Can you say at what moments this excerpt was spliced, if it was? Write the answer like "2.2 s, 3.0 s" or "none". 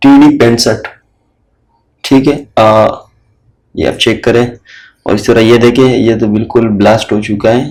none